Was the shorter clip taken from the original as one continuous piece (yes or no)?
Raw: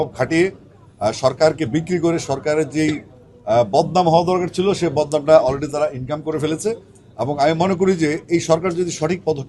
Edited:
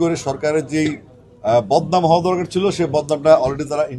yes